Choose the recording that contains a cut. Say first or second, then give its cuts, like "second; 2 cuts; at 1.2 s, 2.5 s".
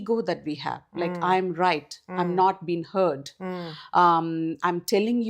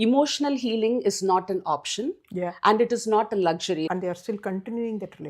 second; 1 cut; at 3.9 s